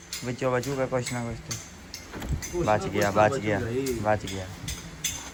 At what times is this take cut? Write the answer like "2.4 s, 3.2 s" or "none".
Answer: none